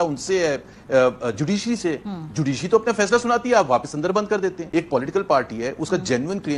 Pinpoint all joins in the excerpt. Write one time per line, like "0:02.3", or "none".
0:04.6